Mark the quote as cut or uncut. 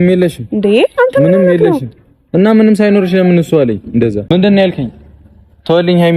cut